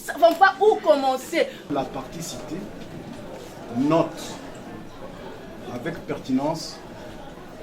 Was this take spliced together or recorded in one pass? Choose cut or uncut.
cut